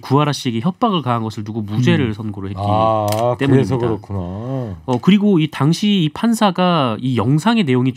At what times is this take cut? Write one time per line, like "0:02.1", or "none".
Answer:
none